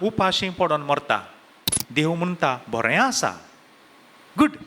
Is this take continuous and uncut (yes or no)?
no